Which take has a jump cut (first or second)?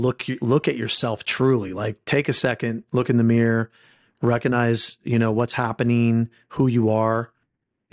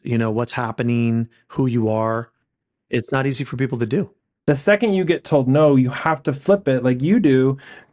second